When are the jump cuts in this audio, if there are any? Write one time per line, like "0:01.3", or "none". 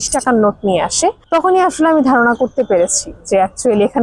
0:01.2